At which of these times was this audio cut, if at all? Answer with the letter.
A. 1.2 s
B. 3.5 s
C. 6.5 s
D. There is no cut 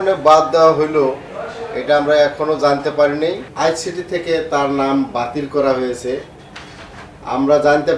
B